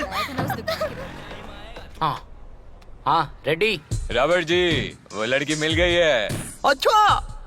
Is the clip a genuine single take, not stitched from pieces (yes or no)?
no